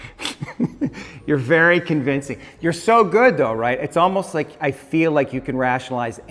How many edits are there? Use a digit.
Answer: 0